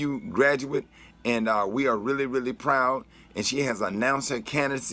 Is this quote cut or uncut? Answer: cut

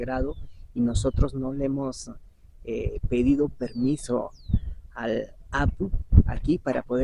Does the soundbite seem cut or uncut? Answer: uncut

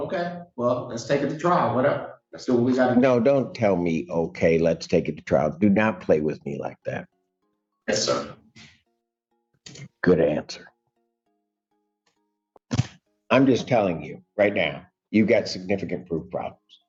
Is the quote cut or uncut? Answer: uncut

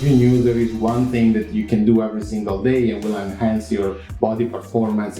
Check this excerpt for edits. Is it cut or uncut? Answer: uncut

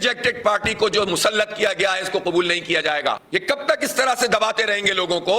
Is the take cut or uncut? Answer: cut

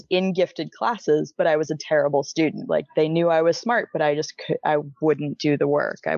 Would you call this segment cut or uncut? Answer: cut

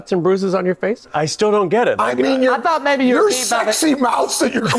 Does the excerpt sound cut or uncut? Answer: cut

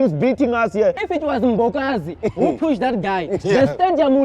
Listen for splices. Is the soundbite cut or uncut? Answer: cut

